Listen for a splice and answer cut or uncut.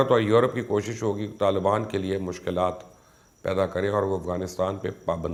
uncut